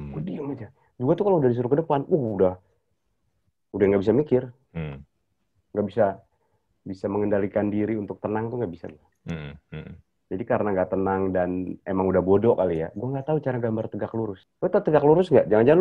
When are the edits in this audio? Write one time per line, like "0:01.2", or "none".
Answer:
0:14.4